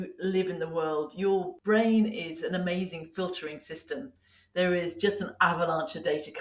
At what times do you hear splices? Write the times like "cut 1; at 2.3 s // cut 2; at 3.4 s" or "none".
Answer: cut 1; at 1.5 s